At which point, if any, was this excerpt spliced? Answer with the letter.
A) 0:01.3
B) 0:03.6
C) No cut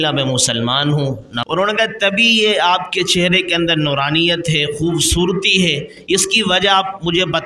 A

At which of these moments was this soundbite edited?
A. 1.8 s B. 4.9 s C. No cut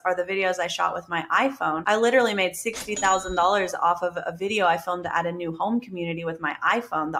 A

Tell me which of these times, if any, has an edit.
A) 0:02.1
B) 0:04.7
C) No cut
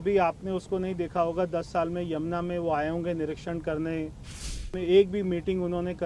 B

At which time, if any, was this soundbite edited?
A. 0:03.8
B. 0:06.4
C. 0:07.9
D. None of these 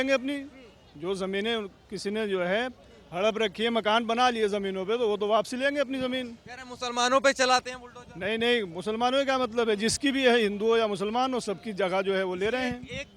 D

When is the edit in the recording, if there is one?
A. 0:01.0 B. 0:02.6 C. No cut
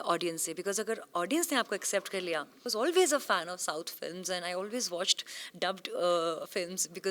B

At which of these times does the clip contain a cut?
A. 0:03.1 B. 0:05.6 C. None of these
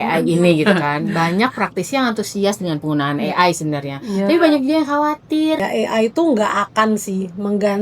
B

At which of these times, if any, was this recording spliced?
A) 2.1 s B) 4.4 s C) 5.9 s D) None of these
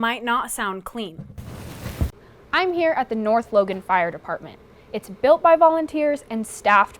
A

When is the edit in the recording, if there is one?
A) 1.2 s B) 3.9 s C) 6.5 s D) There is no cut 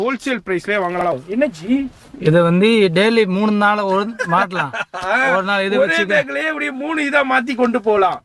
A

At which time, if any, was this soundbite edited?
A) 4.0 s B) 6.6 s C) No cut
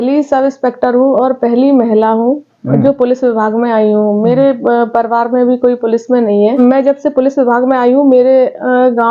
B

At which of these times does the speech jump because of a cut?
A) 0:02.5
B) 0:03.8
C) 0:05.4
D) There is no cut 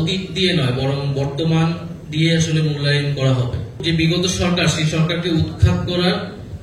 B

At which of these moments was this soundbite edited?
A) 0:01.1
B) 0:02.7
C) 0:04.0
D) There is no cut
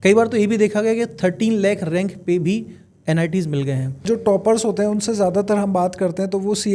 C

